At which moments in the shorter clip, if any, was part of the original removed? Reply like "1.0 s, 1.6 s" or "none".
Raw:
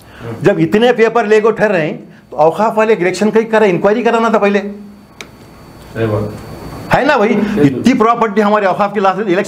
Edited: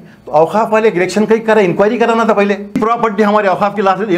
2.8 s